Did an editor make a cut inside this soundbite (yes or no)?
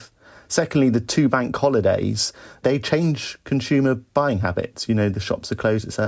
no